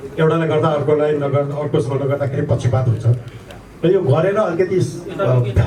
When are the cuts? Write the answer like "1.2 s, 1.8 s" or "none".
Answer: none